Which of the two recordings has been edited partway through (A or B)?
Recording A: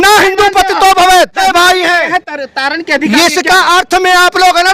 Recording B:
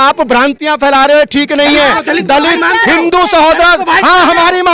A